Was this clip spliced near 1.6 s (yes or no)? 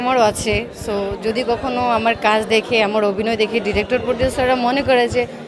no